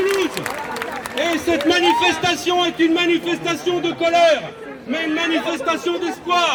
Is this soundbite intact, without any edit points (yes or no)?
yes